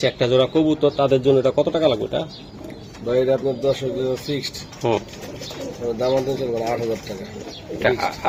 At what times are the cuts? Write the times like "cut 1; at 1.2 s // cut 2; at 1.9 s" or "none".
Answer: none